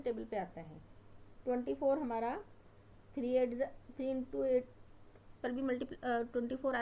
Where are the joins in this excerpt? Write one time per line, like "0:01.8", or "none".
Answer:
none